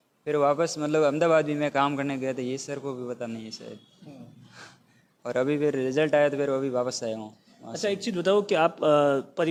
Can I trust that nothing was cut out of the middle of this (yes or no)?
yes